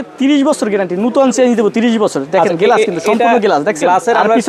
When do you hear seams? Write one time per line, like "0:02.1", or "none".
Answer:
none